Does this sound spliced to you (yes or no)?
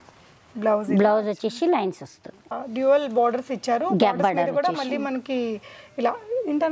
yes